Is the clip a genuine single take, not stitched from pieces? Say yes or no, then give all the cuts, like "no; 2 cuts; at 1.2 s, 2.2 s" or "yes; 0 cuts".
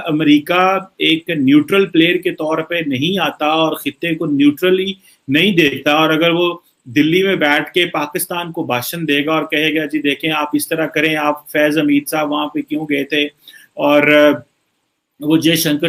yes; 0 cuts